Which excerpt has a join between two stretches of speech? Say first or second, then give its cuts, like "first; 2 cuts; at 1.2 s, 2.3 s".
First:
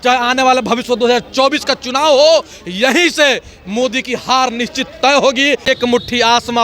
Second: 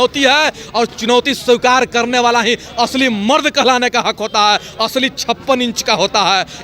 first; 1 cut; at 5.6 s